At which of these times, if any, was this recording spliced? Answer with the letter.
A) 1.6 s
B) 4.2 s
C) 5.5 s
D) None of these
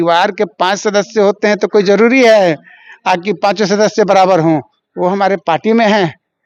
D